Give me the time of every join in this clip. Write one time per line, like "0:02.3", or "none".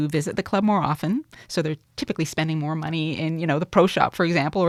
none